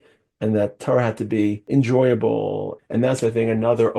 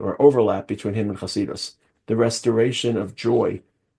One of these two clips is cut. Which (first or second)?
first